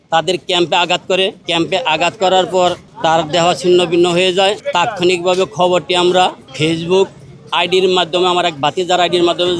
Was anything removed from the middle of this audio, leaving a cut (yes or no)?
yes